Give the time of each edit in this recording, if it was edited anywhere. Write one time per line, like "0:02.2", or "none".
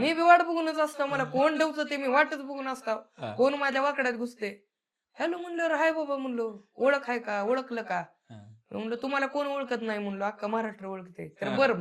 none